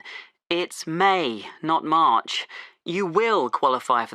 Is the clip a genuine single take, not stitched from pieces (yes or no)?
yes